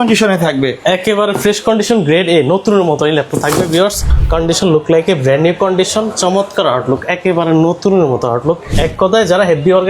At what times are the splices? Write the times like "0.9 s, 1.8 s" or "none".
4.1 s, 8.8 s